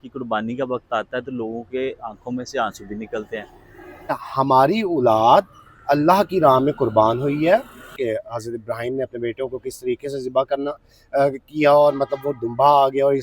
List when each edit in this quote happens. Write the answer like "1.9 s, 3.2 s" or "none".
4.1 s, 7.9 s